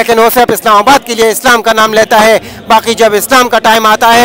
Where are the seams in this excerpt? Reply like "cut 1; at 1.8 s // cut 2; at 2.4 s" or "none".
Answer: none